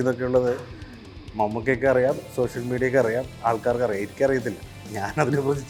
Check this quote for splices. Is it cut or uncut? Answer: uncut